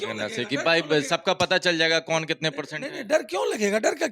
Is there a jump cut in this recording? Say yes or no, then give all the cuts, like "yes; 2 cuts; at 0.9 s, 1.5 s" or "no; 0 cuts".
no; 0 cuts